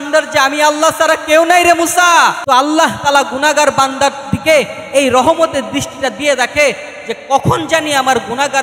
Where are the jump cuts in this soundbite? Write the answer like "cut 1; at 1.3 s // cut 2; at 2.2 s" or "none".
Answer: cut 1; at 2.4 s

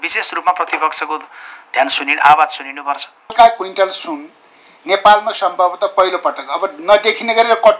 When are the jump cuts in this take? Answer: cut 1; at 3.3 s

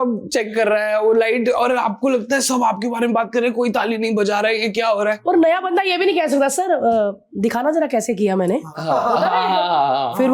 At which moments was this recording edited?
none

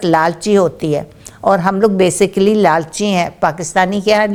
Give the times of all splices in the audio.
none

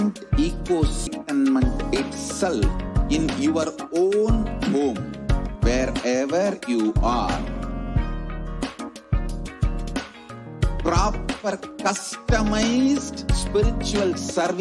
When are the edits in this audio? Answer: cut 1; at 1.1 s

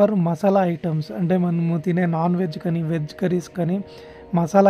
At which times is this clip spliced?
none

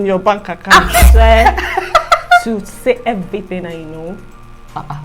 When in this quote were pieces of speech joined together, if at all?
cut 1; at 1.1 s

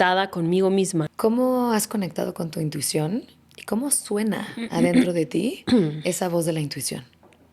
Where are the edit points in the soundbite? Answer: cut 1; at 1.1 s

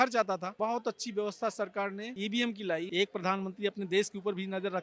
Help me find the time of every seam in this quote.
cut 1; at 2.9 s

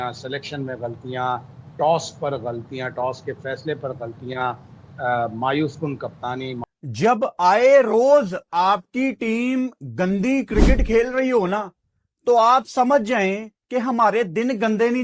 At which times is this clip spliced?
cut 1; at 6.8 s

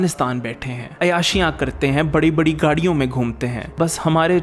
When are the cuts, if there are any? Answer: none

